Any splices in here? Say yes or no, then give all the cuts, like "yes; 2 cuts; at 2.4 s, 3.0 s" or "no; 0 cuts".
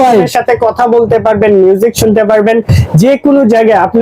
no; 0 cuts